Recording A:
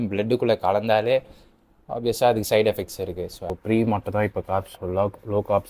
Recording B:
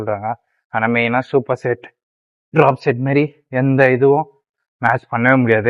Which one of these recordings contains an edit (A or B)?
A